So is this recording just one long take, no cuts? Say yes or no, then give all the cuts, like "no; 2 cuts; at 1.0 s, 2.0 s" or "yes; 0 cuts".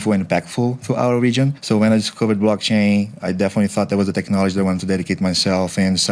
yes; 0 cuts